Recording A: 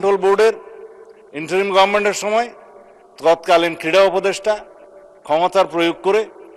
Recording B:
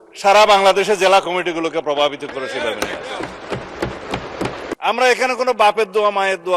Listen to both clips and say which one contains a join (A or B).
B